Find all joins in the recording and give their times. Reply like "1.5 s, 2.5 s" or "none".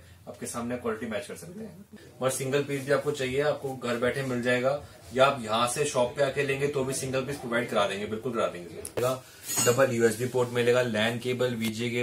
2.0 s, 9.0 s